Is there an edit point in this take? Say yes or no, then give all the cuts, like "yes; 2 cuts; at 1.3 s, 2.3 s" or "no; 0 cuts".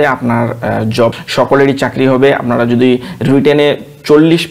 yes; 1 cut; at 1.2 s